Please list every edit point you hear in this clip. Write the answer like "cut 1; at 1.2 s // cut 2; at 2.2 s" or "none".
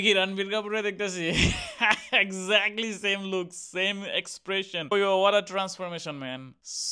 cut 1; at 4.9 s